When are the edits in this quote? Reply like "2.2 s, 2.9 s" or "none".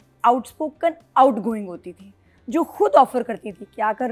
none